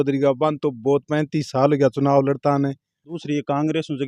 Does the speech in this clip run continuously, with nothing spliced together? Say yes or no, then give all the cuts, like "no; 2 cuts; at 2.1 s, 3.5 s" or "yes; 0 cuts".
no; 1 cut; at 3.2 s